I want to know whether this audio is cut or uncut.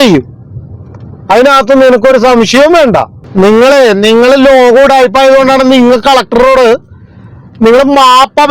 cut